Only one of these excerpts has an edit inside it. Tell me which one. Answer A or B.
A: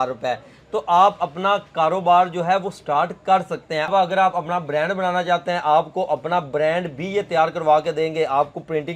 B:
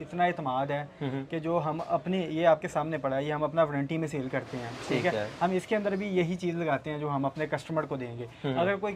A